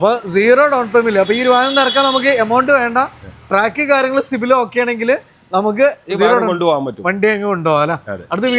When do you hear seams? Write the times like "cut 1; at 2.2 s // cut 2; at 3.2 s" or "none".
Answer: none